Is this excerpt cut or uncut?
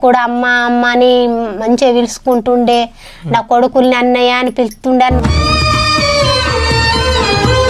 cut